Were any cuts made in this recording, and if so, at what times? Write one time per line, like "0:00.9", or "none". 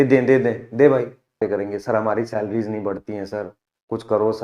0:01.4